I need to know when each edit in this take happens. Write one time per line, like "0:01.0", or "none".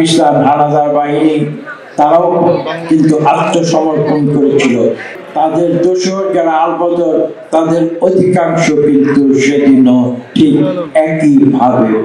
none